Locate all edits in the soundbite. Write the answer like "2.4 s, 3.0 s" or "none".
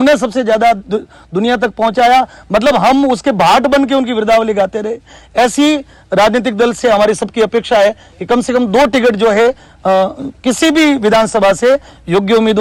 none